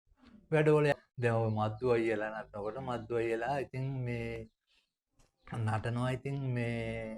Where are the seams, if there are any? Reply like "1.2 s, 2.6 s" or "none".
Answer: 1.0 s